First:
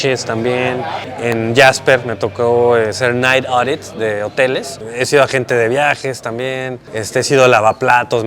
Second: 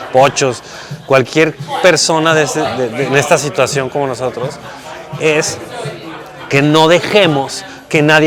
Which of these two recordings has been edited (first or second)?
first